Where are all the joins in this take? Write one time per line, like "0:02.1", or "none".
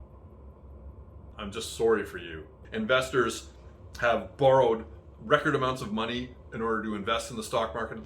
0:01.3
0:02.6